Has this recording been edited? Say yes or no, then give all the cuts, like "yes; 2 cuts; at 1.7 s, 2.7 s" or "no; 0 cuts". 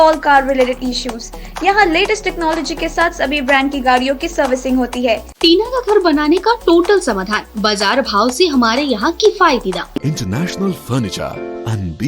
yes; 2 cuts; at 5.4 s, 10.0 s